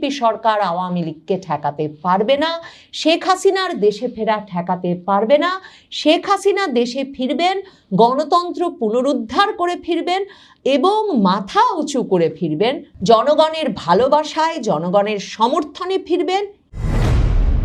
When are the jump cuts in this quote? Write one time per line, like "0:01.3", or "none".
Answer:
0:16.6